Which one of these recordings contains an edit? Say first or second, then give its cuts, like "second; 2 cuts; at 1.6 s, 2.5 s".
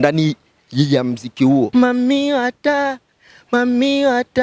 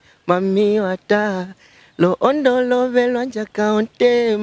first; 1 cut; at 1.7 s